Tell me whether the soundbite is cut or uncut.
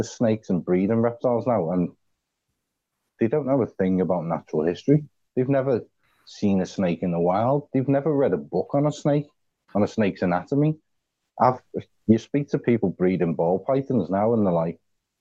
uncut